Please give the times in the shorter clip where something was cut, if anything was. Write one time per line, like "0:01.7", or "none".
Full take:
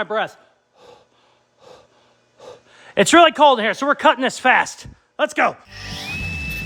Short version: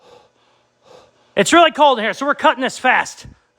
0:01.3